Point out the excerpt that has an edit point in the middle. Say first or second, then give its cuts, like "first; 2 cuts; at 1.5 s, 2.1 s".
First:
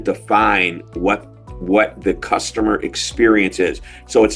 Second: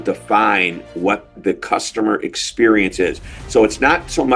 second; 1 cut; at 1.3 s